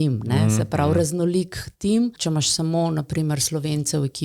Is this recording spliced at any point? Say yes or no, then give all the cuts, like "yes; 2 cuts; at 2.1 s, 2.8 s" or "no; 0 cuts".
yes; 1 cut; at 2.2 s